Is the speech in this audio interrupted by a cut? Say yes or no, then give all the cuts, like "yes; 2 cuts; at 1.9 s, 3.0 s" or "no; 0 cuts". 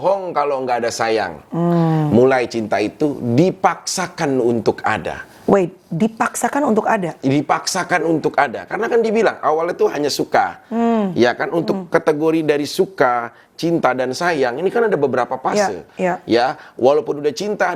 no; 0 cuts